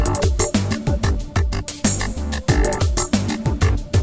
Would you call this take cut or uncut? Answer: uncut